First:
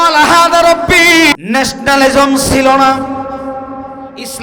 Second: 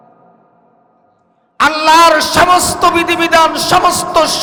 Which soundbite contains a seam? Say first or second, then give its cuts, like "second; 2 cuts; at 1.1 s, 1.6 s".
first; 1 cut; at 1.4 s